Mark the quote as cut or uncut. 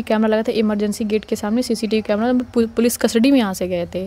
uncut